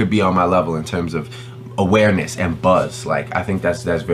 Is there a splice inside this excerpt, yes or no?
no